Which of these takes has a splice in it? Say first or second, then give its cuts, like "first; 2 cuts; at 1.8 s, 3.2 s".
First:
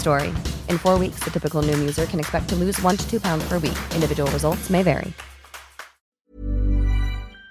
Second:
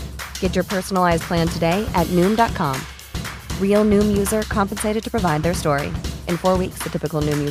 first; 1 cut; at 6.3 s